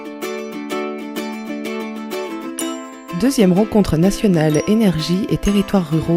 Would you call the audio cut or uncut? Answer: cut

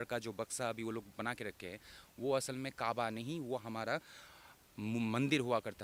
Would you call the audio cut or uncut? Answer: uncut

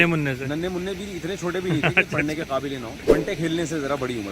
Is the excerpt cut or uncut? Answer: cut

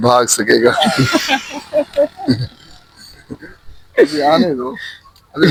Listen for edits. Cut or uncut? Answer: uncut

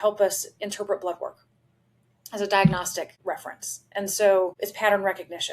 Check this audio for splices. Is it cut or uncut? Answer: cut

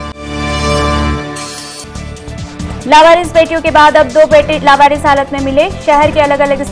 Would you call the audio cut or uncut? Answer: cut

